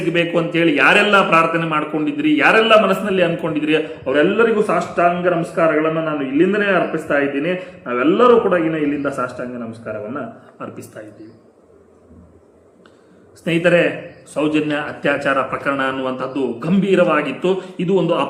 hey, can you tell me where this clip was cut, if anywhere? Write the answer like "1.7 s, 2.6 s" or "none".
none